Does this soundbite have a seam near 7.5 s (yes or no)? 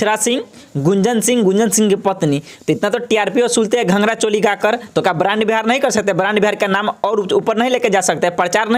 no